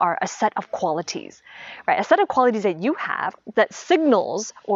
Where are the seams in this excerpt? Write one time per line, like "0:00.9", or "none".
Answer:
0:03.4